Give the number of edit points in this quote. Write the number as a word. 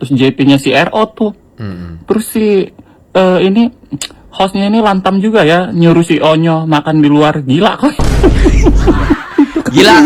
zero